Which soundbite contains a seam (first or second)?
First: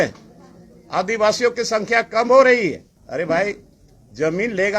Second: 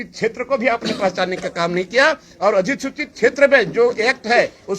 first